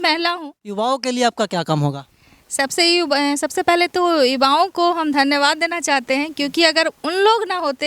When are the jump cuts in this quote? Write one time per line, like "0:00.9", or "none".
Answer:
0:00.9